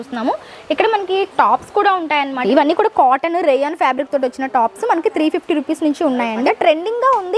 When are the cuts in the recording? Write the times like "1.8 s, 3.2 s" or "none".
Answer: 2.4 s, 6.4 s